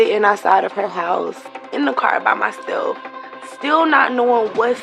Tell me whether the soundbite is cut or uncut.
cut